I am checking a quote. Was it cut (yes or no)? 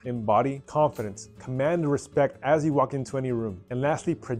no